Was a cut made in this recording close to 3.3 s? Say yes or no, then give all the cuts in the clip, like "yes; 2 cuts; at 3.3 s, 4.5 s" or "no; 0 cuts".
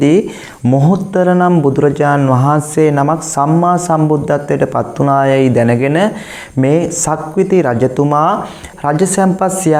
no; 0 cuts